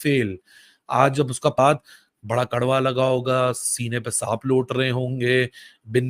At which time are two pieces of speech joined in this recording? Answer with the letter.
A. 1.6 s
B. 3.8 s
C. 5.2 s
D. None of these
A